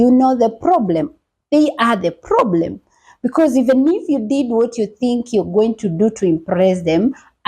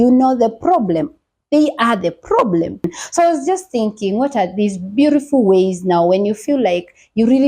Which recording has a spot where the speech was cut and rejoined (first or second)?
second